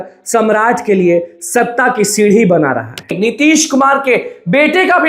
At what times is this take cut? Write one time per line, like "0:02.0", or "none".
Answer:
0:03.1